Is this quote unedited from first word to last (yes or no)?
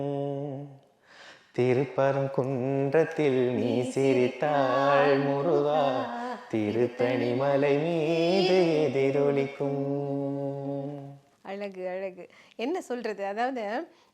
yes